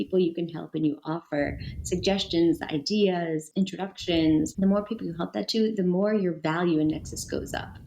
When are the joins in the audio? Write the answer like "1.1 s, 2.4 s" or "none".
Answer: 3.5 s, 4.5 s